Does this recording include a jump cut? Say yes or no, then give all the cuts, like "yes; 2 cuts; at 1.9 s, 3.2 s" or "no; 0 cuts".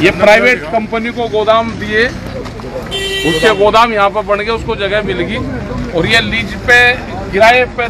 no; 0 cuts